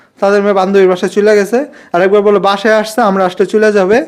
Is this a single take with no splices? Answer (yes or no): yes